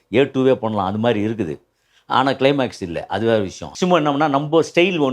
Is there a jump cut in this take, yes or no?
yes